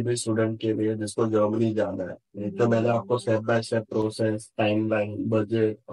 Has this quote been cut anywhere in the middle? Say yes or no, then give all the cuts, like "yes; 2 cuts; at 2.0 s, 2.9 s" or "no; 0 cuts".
no; 0 cuts